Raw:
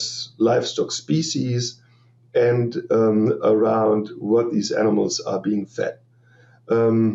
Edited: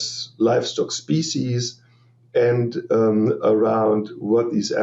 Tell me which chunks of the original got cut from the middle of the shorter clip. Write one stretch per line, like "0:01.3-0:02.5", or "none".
none